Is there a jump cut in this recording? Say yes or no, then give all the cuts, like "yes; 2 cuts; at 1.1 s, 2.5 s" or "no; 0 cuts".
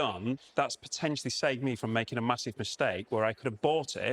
no; 0 cuts